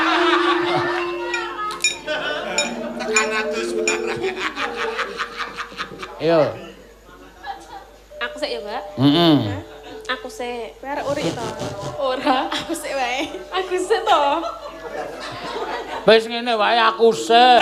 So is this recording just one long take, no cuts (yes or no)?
yes